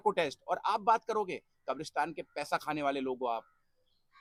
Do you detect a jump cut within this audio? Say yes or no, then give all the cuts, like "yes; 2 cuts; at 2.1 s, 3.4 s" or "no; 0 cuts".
no; 0 cuts